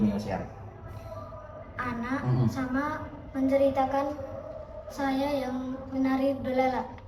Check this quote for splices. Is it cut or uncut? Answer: uncut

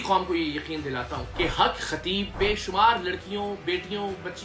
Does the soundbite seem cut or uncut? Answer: cut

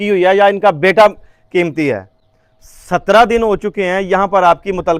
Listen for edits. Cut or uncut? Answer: uncut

